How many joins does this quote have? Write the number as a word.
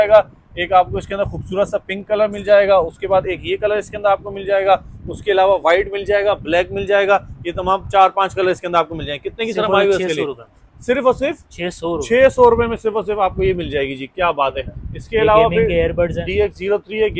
zero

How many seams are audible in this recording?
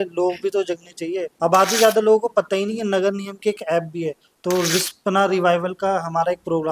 two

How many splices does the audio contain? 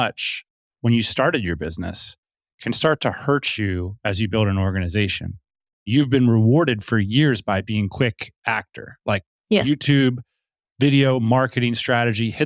one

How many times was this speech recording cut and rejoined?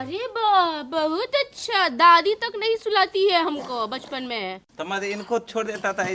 zero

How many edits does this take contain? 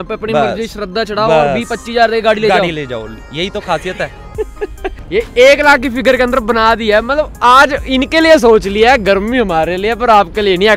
one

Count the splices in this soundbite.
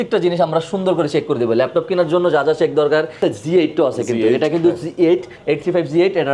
one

